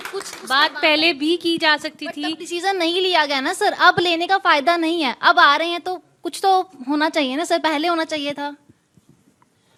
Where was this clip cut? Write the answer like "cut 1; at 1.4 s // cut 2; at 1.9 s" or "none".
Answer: none